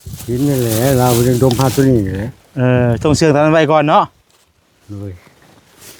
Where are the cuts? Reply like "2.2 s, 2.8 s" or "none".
none

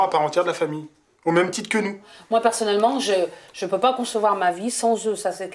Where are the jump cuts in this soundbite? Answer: 2.1 s

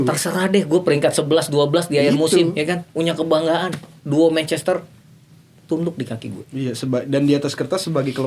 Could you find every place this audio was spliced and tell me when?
none

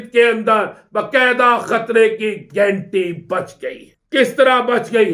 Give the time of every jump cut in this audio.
3.9 s

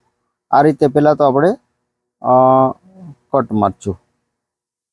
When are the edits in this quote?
none

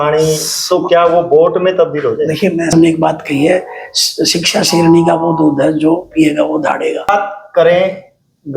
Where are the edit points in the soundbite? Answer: 2.7 s, 7.1 s

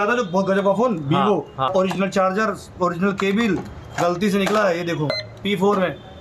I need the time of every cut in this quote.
1.7 s, 5.1 s

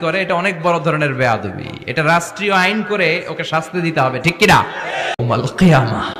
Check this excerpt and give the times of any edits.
5.2 s

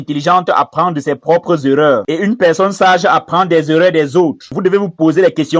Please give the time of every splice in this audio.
4.5 s

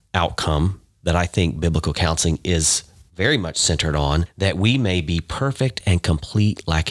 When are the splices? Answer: 4.3 s

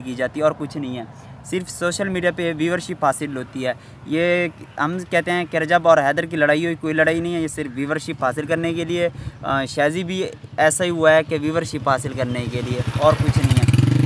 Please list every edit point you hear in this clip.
none

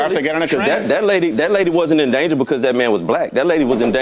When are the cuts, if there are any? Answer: 1.4 s

